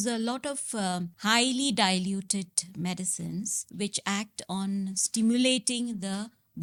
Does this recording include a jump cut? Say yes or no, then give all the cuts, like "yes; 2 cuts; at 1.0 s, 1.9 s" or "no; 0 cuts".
no; 0 cuts